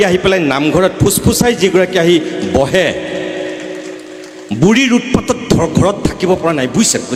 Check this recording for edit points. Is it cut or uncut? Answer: uncut